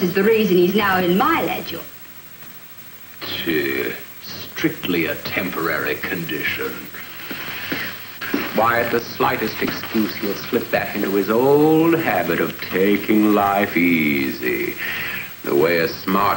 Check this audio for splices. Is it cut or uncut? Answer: uncut